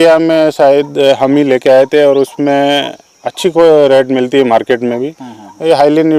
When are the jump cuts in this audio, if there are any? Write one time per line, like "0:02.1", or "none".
none

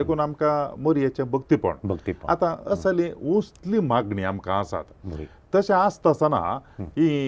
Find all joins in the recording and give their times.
none

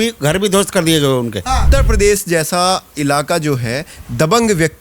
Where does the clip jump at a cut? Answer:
0:01.7

